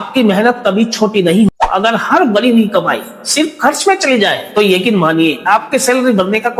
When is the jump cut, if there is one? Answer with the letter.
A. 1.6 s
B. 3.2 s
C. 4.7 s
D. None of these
A